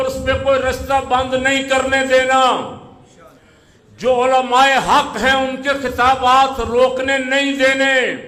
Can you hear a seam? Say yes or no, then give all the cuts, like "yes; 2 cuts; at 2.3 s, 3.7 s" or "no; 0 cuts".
no; 0 cuts